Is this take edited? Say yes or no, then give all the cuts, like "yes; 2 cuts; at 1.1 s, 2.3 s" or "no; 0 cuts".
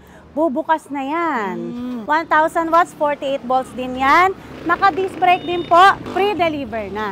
yes; 2 cuts; at 2.0 s, 6.0 s